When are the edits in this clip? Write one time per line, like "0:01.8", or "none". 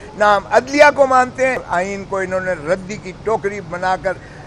0:01.6